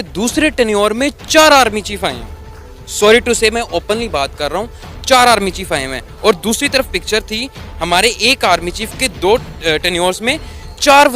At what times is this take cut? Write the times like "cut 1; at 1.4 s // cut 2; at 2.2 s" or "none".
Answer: cut 1; at 9.1 s